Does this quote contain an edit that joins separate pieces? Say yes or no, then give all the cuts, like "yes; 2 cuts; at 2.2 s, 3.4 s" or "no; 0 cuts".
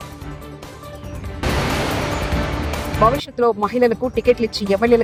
no; 0 cuts